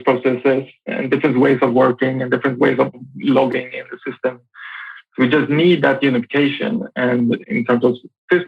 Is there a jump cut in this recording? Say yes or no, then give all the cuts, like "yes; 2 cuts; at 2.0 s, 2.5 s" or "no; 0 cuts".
yes; 3 cuts; at 0.9 s, 3.0 s, 7.4 s